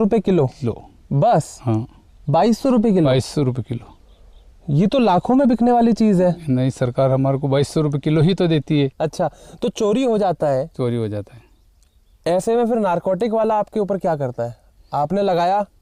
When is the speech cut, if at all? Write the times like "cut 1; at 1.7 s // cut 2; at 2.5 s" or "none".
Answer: cut 1; at 8.9 s